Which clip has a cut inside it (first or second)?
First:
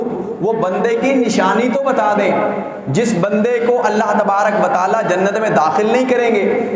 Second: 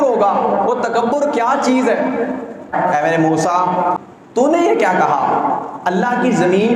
second